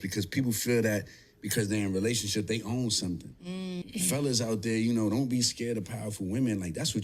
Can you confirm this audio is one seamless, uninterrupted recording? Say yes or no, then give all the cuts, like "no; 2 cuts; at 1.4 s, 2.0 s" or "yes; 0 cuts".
no; 1 cut; at 3.8 s